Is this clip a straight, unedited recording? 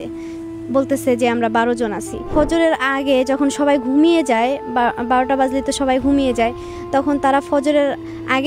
no; 1 cut; at 2.3 s

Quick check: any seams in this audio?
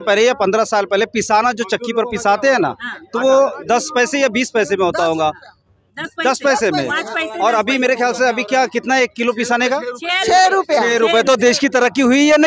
no; 0 cuts

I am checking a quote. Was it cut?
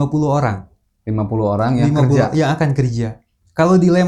no; 0 cuts

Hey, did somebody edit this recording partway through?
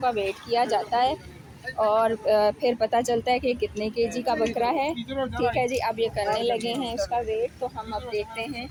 no; 0 cuts

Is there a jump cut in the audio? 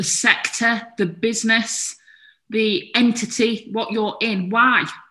no; 0 cuts

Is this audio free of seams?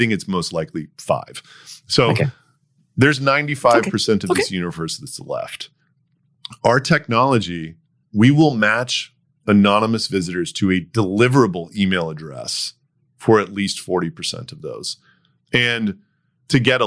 yes; 0 cuts

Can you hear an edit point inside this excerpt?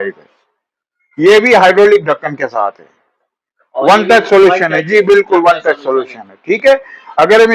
no; 0 cuts

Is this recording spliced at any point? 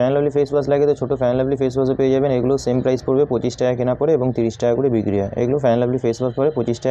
no; 0 cuts

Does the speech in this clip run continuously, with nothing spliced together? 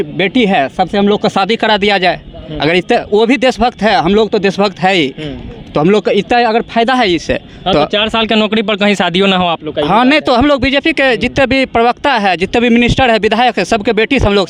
yes; 0 cuts

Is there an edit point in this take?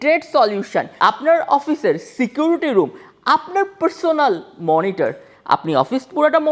yes; 1 cut; at 0.9 s

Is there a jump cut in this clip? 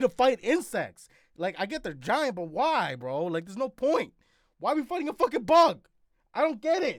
no; 0 cuts

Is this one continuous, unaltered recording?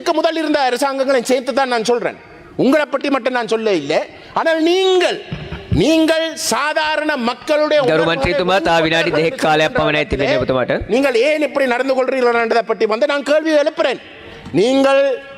yes; 0 cuts

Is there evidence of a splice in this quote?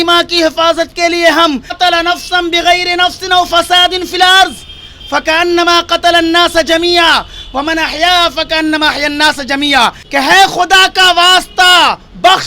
yes; 2 cuts; at 1.7 s, 10.0 s

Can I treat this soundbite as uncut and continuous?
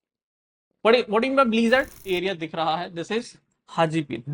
no; 1 cut; at 2.0 s

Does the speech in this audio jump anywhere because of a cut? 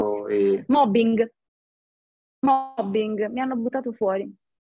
no; 0 cuts

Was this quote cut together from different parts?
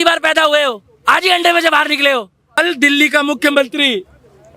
yes; 1 cut; at 2.6 s

